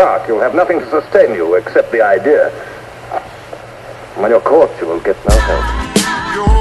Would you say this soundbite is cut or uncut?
cut